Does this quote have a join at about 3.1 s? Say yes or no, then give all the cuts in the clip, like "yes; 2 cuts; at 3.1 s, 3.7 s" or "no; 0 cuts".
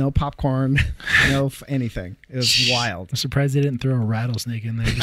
yes; 1 cut; at 3.1 s